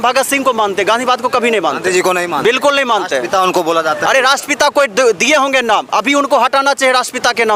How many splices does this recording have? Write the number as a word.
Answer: zero